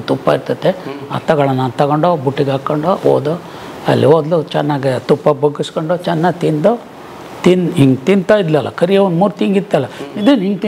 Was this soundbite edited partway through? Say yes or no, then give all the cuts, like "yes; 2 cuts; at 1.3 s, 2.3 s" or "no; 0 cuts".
no; 0 cuts